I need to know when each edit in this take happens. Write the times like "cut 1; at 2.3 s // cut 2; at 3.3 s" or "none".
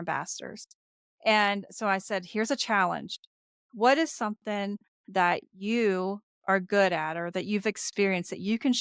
none